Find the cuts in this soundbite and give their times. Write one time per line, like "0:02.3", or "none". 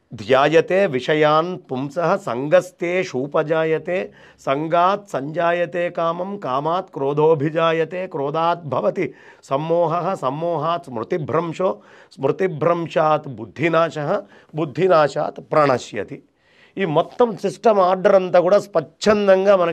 none